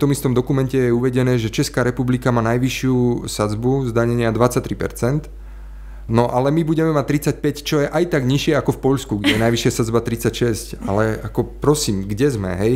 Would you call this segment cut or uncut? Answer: uncut